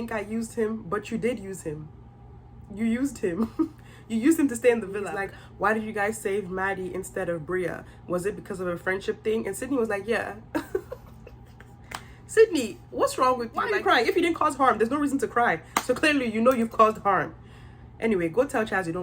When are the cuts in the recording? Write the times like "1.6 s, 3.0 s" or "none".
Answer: 4.9 s, 13.7 s